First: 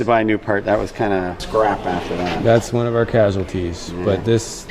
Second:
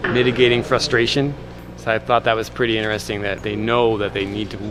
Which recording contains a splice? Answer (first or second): first